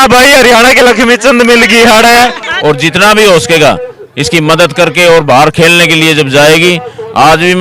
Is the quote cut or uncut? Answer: cut